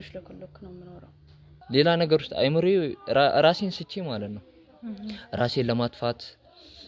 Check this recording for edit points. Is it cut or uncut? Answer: cut